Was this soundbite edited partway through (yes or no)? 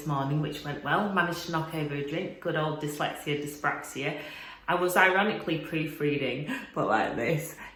no